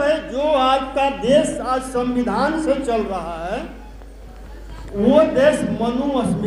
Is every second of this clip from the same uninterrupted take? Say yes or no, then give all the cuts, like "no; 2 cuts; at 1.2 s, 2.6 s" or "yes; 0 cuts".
yes; 0 cuts